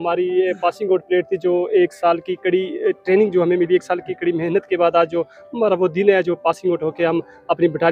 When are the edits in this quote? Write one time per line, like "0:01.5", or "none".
none